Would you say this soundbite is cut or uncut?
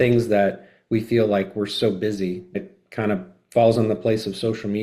cut